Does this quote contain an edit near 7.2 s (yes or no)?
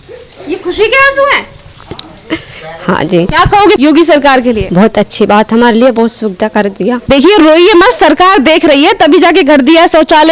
no